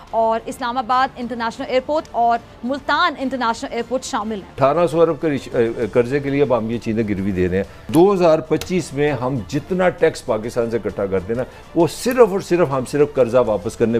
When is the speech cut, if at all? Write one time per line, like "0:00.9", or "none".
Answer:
0:04.6
0:07.9